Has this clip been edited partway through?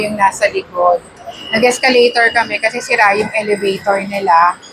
no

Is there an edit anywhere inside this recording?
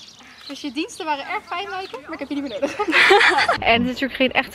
yes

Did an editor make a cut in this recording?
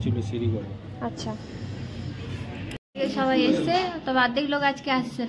yes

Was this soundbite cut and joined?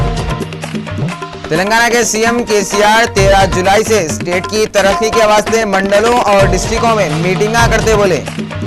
yes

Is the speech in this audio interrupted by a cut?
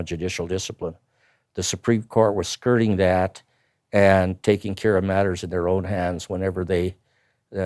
no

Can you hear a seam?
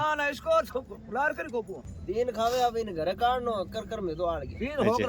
yes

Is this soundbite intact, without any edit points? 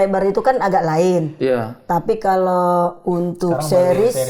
yes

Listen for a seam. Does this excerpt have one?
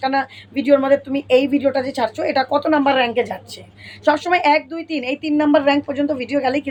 no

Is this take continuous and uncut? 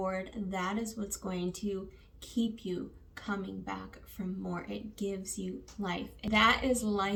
yes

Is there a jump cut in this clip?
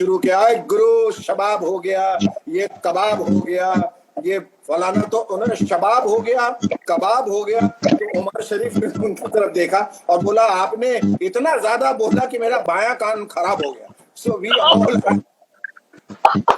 yes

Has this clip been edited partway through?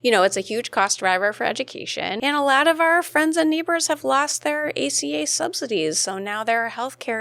yes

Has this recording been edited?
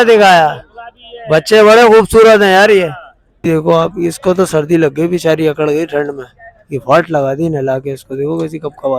yes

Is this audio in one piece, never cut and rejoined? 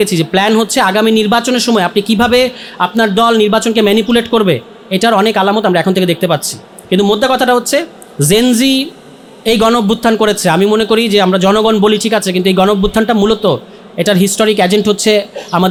yes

